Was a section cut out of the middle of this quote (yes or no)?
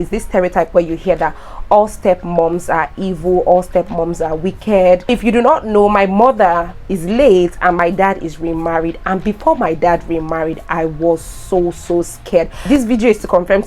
yes